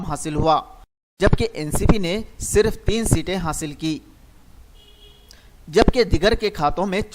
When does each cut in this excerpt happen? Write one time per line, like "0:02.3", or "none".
0:05.7